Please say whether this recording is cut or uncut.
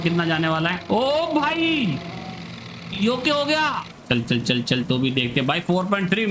cut